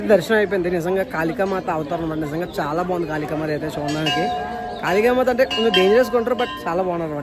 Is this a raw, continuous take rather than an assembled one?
yes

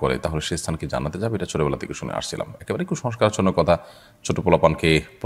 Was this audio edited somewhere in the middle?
no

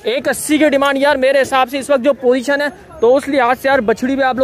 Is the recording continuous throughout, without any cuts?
yes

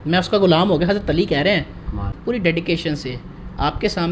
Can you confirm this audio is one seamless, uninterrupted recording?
no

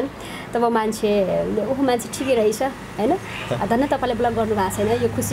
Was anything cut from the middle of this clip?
no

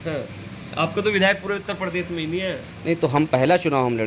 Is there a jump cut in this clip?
no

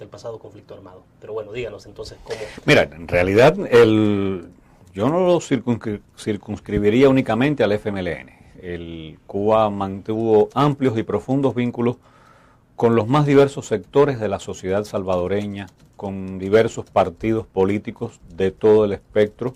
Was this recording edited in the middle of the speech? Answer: yes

